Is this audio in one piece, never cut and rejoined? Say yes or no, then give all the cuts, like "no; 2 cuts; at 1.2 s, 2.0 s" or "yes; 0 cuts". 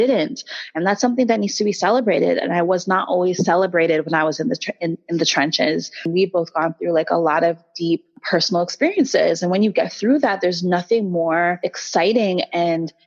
no; 3 cuts; at 6.1 s, 8.2 s, 11.7 s